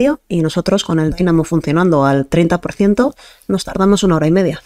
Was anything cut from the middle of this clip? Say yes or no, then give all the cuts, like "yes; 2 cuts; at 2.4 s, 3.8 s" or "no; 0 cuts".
no; 0 cuts